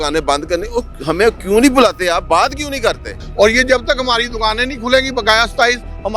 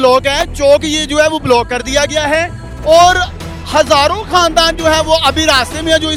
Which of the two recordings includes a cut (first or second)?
first